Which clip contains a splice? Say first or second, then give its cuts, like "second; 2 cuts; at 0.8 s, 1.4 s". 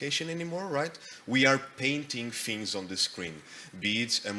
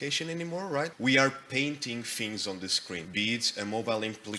second; 2 cuts; at 0.9 s, 3.1 s